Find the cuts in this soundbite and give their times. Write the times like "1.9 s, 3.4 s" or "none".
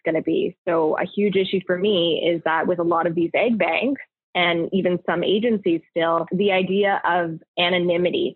6.3 s

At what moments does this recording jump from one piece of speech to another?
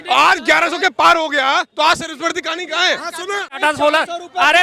3.6 s

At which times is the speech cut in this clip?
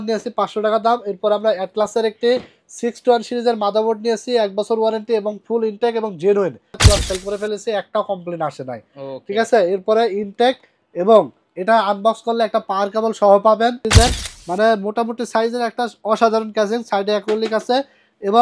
6.8 s, 13.8 s

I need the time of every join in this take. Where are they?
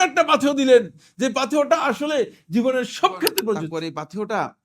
3.7 s

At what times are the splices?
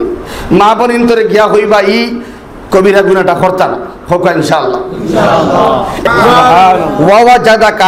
6.0 s

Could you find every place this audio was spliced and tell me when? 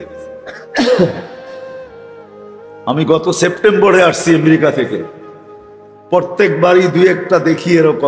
1.3 s, 2.8 s

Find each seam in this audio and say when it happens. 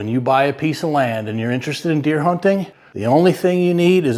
none

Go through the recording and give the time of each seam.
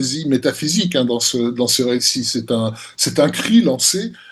none

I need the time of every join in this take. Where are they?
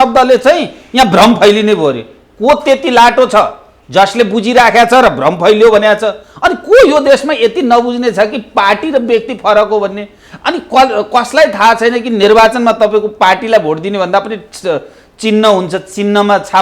none

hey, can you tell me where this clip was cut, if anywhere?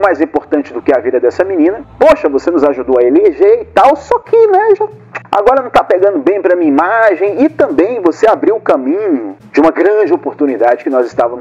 1.9 s

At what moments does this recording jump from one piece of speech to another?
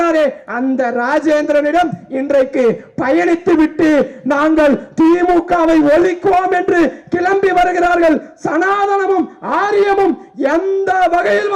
none

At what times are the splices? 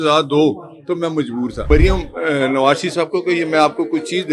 1.6 s

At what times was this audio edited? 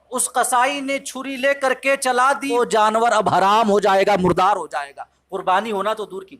2.5 s

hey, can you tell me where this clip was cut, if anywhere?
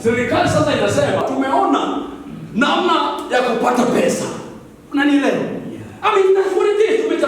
1.2 s

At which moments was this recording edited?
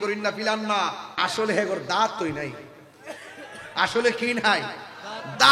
1.1 s

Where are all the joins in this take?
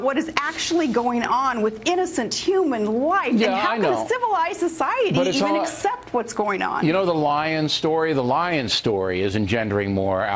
1.4 s

